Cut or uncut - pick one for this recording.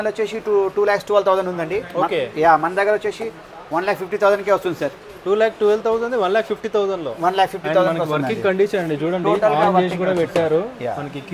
uncut